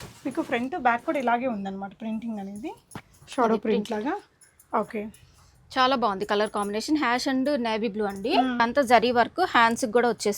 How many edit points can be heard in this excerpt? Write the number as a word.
one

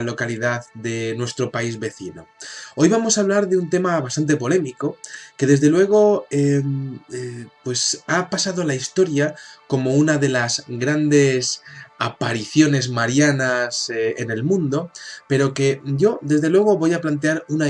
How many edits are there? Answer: one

